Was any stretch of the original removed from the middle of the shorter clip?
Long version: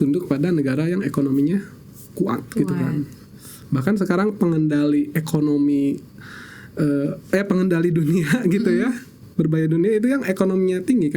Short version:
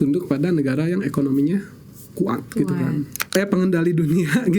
yes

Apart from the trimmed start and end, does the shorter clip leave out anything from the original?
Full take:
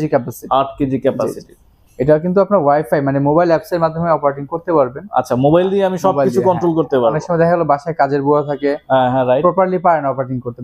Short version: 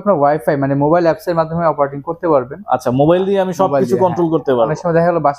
no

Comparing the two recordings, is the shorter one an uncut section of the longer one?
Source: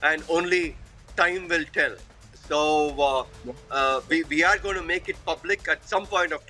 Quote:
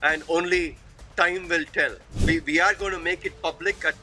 no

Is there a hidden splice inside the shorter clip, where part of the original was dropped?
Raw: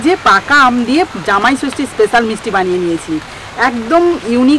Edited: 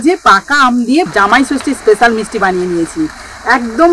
yes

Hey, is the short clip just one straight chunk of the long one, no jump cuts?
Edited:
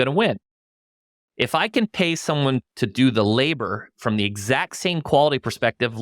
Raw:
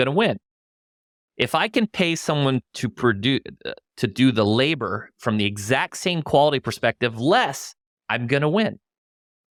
no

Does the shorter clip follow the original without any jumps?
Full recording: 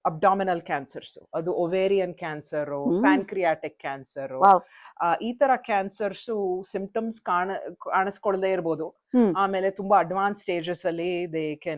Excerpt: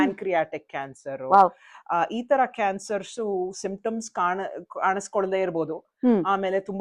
yes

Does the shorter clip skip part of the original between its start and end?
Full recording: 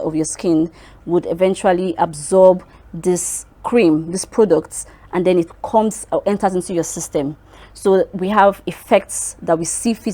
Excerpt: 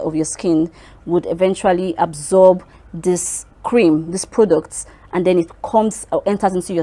no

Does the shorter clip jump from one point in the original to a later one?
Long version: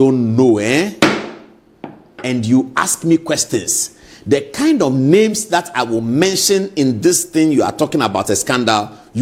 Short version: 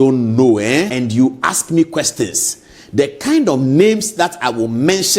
yes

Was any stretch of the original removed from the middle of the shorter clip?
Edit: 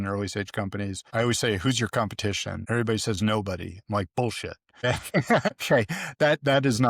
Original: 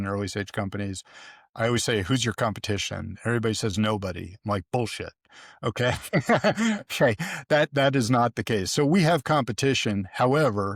yes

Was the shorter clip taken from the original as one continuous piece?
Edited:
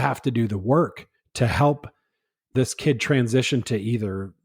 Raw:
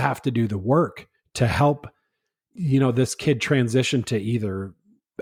no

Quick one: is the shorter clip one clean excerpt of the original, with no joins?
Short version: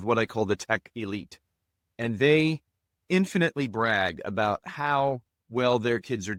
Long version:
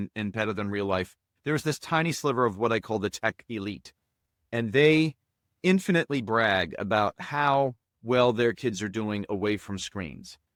yes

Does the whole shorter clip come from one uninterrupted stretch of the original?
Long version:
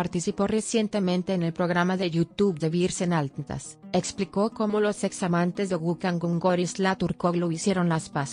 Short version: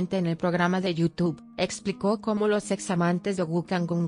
no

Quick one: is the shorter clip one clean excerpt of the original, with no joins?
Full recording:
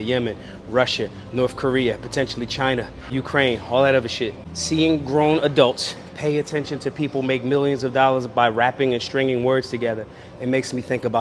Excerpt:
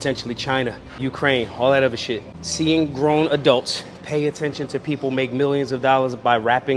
yes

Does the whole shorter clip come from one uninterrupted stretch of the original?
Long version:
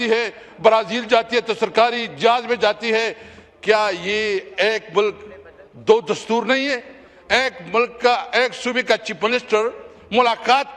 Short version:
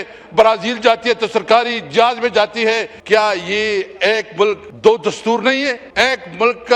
no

